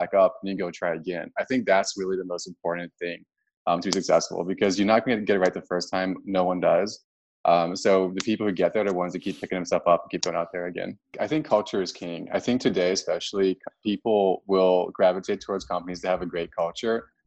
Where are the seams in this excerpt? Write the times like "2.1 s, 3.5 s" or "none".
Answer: 11.1 s